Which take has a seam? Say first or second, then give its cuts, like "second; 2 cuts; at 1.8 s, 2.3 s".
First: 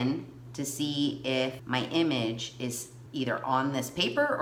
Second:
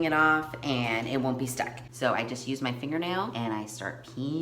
second; 2 cuts; at 1.8 s, 3.3 s